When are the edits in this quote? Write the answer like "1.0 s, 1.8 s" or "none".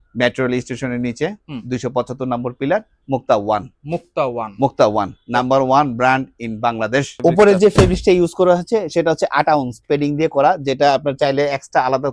7.1 s